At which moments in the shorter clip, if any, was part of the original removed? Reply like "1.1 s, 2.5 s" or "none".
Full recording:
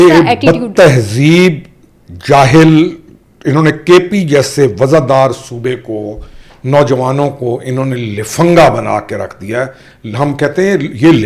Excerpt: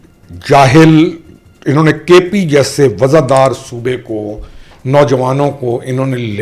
none

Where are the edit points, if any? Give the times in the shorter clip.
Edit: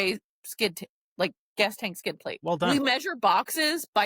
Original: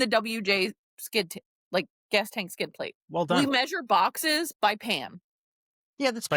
2.7 s

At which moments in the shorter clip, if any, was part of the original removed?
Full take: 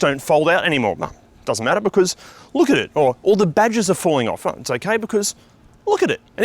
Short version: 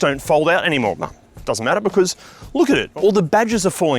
2.9 s

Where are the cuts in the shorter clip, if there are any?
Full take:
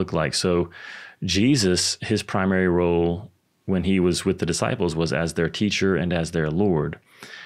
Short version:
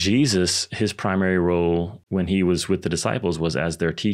2.0 s

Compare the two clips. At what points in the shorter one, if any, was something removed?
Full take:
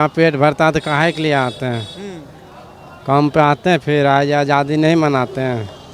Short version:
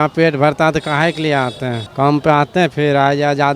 1.8 s

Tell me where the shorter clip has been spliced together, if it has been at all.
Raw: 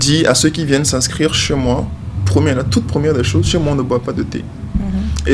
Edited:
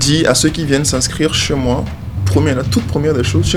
none

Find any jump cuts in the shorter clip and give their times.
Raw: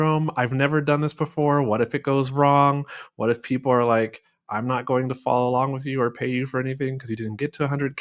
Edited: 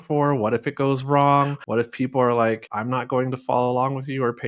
1.6 s, 2.7 s

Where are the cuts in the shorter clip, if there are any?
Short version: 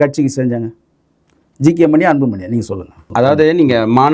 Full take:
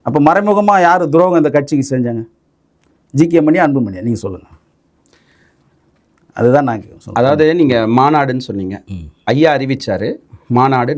2.9 s

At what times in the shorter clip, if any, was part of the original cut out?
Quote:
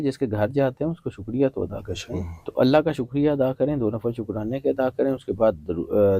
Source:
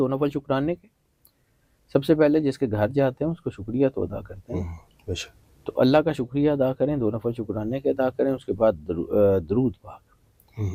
2.4 s

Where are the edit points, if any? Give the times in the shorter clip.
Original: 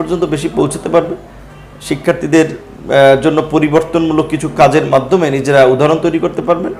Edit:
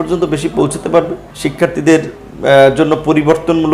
1.2 s

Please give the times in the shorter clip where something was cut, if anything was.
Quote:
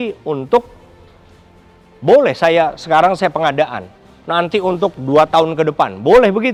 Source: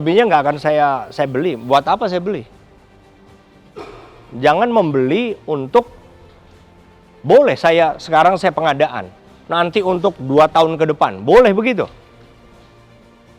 none

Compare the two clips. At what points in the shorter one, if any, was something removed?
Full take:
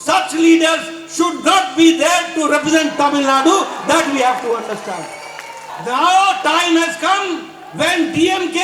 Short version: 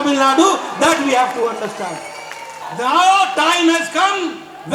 none

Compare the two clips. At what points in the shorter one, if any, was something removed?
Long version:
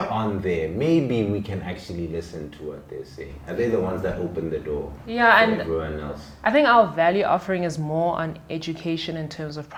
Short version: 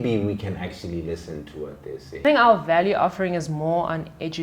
2.2 s

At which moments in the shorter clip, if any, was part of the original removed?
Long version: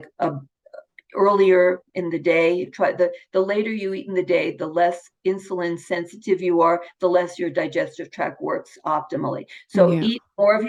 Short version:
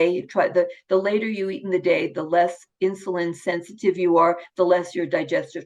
none

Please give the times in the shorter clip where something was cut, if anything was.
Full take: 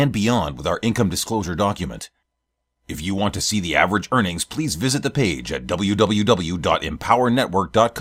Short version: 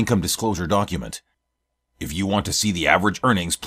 none

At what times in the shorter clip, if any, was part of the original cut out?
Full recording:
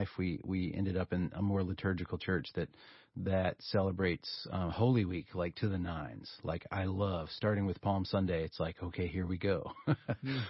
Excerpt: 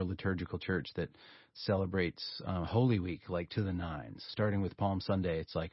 1.6 s, 4.3 s

